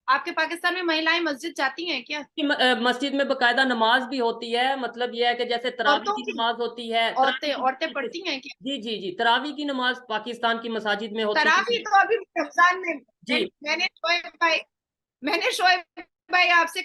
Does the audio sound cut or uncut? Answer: uncut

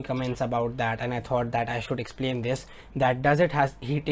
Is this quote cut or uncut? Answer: uncut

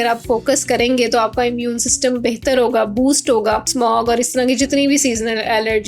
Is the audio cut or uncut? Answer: cut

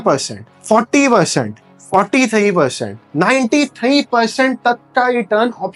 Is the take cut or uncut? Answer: uncut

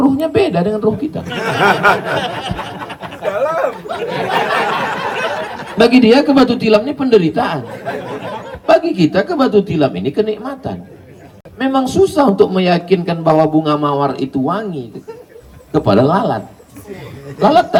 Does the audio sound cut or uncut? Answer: uncut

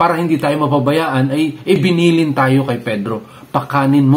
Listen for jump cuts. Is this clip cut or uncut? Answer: cut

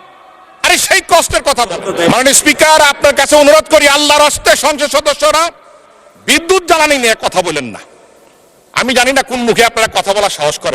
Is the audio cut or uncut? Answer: cut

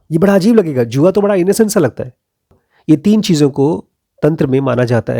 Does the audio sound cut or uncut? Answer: cut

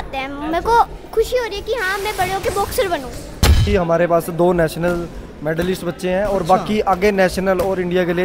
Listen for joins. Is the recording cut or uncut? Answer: cut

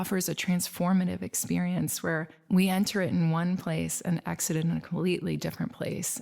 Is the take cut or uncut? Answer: uncut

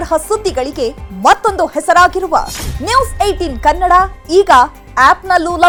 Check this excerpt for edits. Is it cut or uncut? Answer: uncut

